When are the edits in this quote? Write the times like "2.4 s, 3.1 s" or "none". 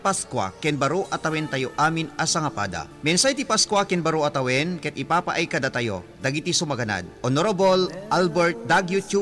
none